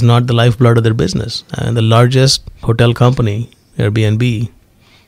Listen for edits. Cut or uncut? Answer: cut